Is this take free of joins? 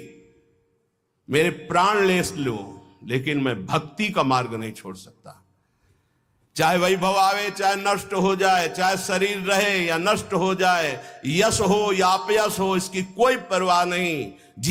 yes; 0 cuts

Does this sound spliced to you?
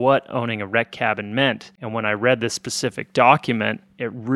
no; 0 cuts

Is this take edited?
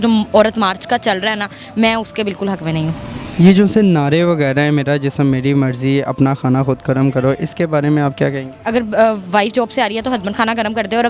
no; 0 cuts

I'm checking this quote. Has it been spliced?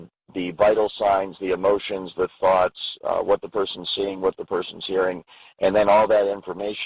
no; 0 cuts

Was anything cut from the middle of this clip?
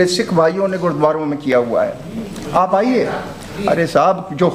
no; 0 cuts

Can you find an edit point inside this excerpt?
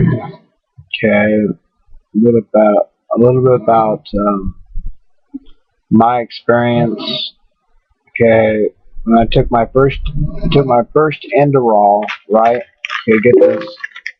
no; 0 cuts

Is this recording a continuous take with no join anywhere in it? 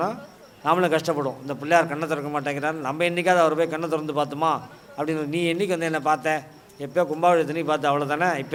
yes; 0 cuts

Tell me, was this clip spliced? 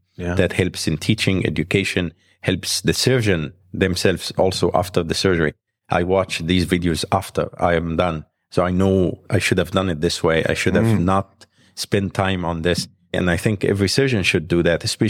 yes; 1 cut; at 13.2 s

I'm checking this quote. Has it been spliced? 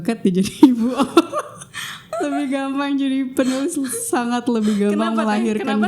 yes; 1 cut; at 2.0 s

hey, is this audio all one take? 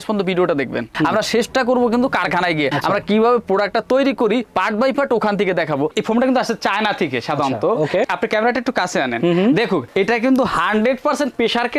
no; 2 cuts; at 0.9 s, 5.9 s

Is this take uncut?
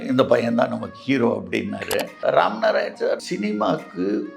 no; 2 cuts; at 2.2 s, 3.2 s

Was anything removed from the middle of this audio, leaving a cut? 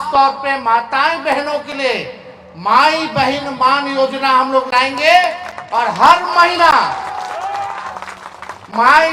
no; 0 cuts

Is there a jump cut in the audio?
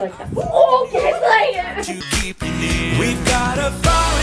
no; 0 cuts

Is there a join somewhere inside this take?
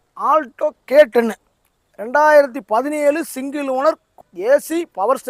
yes; 1 cut; at 4.2 s

